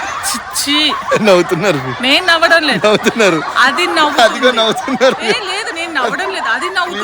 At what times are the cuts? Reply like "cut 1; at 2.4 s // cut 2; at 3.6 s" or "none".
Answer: none